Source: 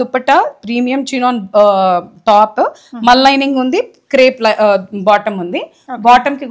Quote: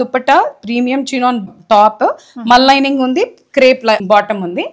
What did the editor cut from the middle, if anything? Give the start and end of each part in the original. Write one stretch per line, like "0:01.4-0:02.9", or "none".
0:01.5-0:02.0
0:04.6-0:05.0